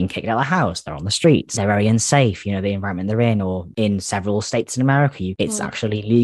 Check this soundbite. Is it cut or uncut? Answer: cut